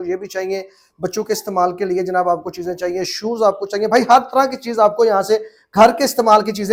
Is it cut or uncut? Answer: uncut